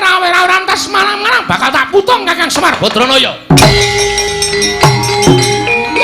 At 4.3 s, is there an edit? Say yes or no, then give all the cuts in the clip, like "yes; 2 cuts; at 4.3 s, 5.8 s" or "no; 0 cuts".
yes; 1 cut; at 4.3 s